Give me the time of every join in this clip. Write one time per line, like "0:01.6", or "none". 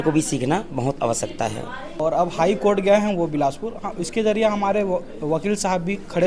0:02.0